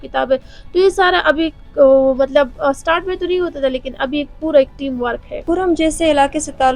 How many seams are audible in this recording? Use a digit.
1